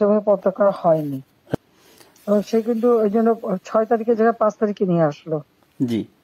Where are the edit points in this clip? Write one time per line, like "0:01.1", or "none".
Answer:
0:01.6